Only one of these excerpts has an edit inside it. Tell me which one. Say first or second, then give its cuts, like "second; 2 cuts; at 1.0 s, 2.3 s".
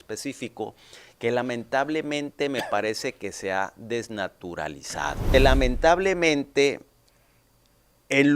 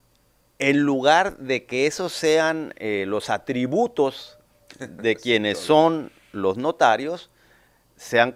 first; 1 cut; at 5.5 s